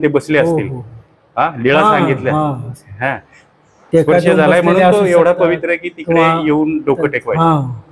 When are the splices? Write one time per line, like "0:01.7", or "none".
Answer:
none